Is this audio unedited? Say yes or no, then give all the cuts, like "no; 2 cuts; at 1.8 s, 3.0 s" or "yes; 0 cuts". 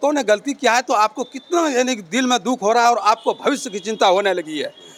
yes; 0 cuts